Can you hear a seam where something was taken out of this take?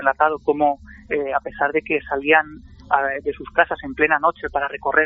no; 0 cuts

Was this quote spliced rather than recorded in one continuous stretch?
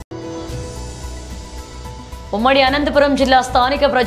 no; 0 cuts

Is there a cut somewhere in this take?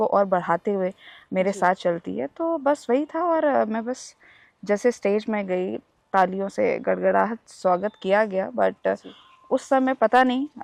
no; 0 cuts

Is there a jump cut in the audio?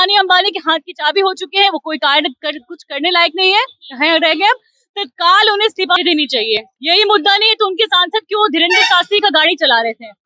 yes; 1 cut; at 6.7 s

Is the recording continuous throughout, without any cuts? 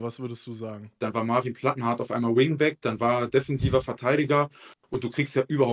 no; 1 cut; at 0.9 s

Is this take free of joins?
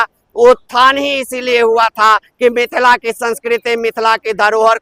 yes; 0 cuts

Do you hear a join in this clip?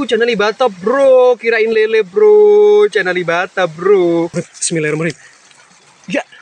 yes; 1 cut; at 4.3 s

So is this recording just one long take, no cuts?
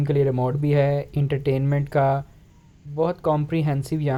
yes; 0 cuts

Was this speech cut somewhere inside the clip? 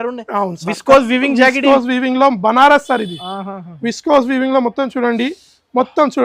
no; 0 cuts

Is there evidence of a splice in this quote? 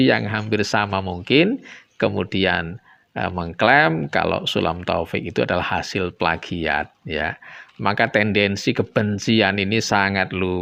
no; 0 cuts

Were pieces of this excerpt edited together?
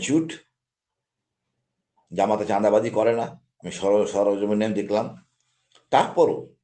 no; 0 cuts

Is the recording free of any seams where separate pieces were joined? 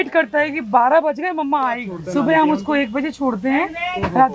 no; 1 cut; at 1.9 s

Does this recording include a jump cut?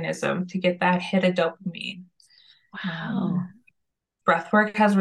no; 0 cuts

